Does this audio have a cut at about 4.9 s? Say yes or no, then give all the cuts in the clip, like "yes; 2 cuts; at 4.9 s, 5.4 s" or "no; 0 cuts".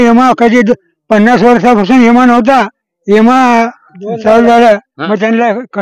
yes; 1 cut; at 4.9 s